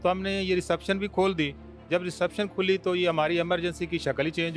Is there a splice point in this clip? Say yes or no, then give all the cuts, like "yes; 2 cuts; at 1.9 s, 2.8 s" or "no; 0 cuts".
no; 0 cuts